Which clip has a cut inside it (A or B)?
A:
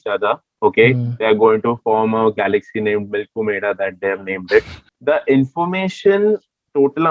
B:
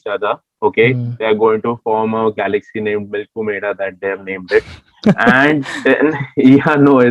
A